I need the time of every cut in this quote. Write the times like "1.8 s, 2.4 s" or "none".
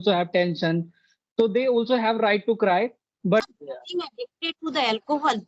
3.5 s

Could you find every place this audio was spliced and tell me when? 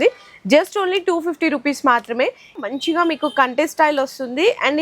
2.5 s

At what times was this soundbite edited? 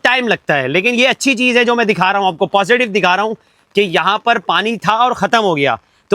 none

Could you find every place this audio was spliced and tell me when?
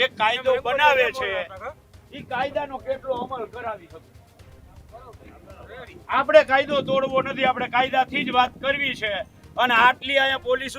none

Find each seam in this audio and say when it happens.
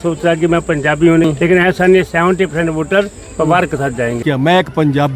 1.3 s, 4.2 s

